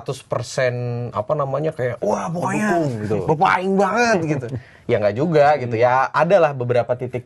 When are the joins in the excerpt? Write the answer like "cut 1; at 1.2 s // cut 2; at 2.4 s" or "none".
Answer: none